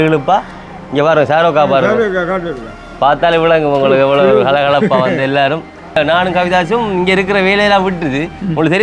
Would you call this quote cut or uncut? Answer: cut